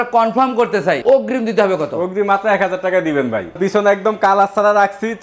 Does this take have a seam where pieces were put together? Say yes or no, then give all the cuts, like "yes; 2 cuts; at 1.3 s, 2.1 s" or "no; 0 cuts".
yes; 2 cuts; at 1.0 s, 3.5 s